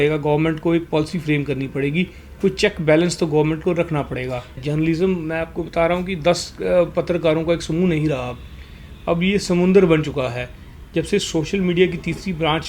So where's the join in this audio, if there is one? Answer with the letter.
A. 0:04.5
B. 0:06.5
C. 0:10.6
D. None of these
A